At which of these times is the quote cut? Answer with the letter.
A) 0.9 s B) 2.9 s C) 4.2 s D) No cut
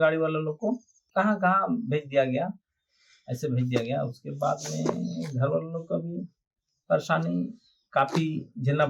A